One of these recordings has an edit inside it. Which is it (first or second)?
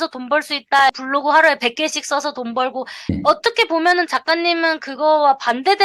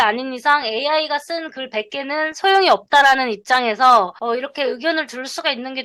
first